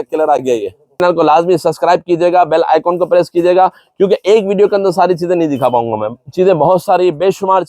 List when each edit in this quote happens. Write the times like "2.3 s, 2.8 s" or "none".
1.0 s